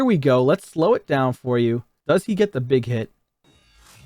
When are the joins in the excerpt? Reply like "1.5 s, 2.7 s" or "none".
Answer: 1.9 s